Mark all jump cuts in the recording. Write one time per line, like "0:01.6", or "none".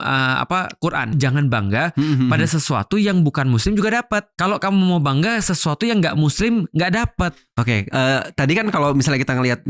0:01.1
0:04.3
0:07.3